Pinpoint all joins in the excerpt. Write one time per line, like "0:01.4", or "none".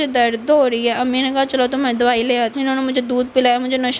0:02.5